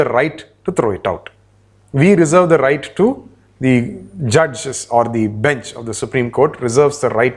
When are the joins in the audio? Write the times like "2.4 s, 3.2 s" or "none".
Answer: none